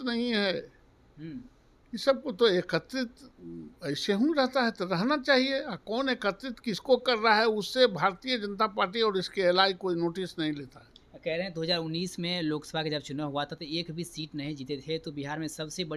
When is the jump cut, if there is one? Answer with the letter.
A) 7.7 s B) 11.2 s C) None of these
C